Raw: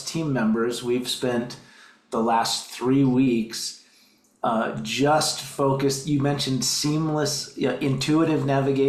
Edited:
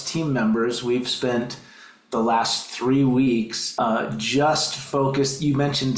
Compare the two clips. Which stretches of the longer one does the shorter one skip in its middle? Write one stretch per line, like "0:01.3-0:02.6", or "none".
0:03.6-0:04.3